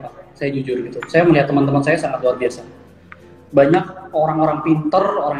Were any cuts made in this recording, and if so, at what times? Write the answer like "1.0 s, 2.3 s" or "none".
none